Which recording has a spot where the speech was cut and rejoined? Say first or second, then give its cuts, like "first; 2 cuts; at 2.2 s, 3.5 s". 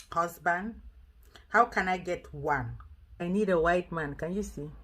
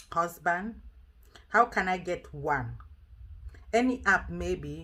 first; 1 cut; at 3.2 s